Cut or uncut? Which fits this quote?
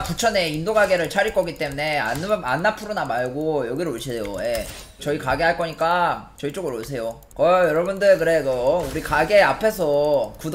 cut